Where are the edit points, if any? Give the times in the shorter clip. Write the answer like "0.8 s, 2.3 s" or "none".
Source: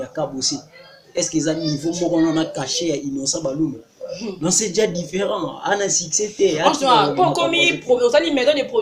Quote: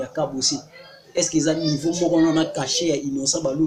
none

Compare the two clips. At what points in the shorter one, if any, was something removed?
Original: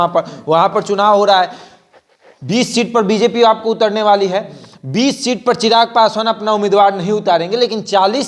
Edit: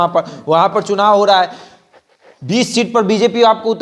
none

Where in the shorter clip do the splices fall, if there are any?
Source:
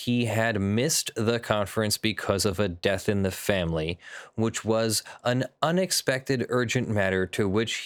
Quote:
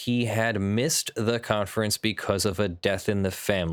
none

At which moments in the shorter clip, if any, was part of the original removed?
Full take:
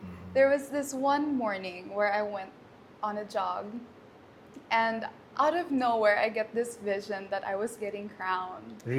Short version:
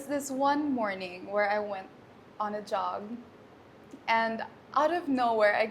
none

